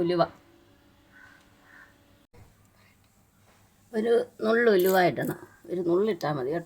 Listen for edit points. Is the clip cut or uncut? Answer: cut